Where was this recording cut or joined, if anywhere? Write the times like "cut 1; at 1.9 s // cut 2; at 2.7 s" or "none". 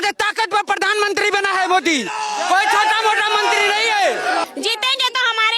cut 1; at 4.4 s